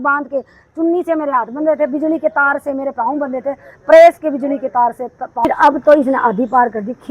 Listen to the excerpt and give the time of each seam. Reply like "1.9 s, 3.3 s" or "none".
5.5 s